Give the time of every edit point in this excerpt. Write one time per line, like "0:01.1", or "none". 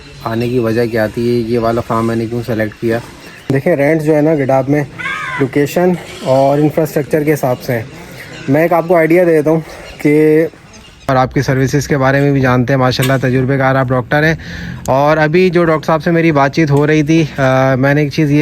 0:03.4
0:11.1